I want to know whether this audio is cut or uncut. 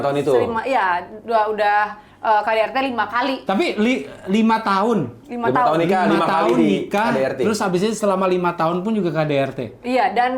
uncut